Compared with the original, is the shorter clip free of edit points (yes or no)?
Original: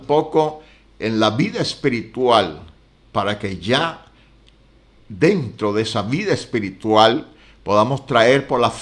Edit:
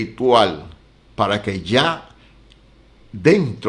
yes